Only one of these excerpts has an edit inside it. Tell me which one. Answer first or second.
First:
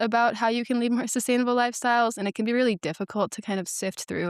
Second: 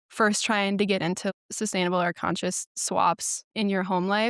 second